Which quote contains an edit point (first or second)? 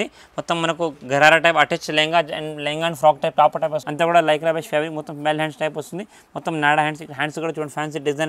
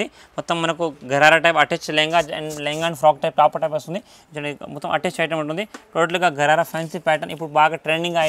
first